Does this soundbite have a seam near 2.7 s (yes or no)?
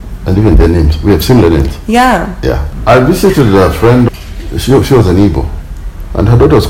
yes